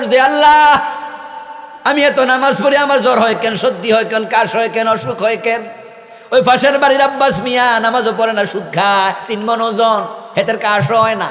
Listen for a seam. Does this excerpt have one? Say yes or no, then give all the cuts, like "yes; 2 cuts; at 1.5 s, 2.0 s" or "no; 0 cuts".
no; 0 cuts